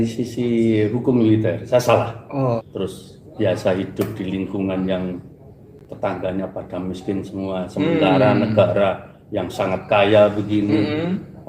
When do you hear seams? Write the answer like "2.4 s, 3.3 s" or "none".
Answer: 2.7 s